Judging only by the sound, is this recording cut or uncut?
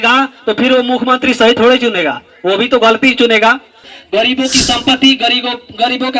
cut